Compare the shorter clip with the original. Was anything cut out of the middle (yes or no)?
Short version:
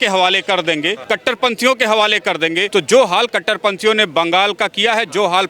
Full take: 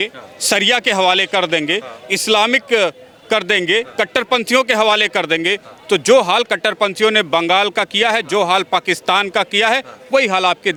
yes